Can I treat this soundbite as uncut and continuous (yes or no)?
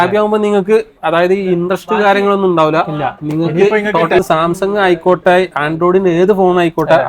no